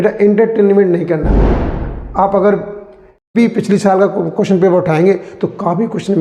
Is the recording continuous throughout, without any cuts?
no; 1 cut; at 3.3 s

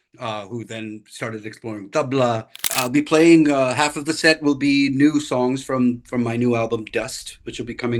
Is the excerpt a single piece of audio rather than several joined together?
no; 1 cut; at 2.7 s

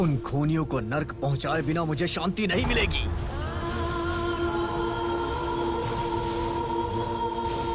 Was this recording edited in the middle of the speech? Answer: no; 0 cuts

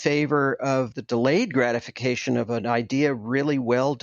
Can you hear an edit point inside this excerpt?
yes; 2 cuts; at 0.9 s, 2.5 s

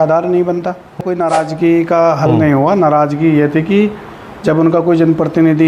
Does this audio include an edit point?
yes; 1 cut; at 1.0 s

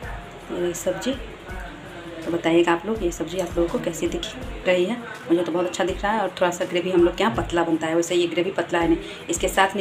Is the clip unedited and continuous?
yes; 0 cuts

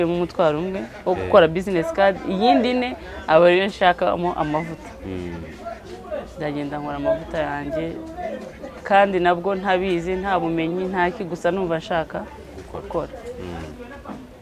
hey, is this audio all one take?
yes; 0 cuts

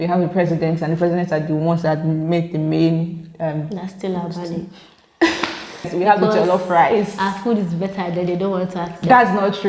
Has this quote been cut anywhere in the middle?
yes; 1 cut; at 5.9 s

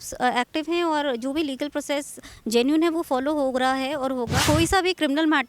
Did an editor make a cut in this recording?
yes; 1 cut; at 4.4 s

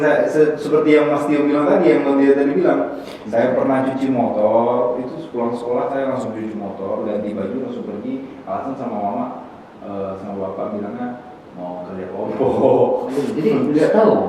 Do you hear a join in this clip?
no; 0 cuts

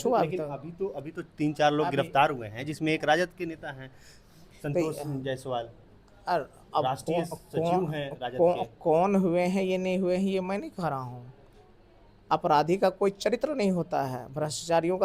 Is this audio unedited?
yes; 0 cuts

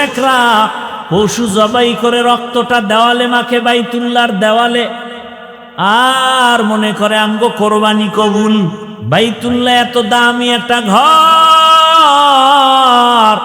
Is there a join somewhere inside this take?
yes; 1 cut; at 8.9 s

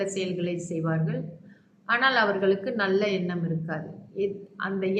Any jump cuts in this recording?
no; 0 cuts

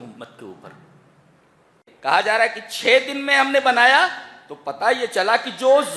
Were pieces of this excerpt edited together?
yes; 1 cut; at 1.8 s

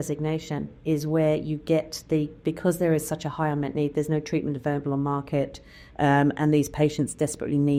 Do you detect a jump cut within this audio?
no; 0 cuts

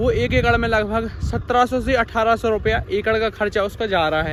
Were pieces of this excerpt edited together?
no; 0 cuts

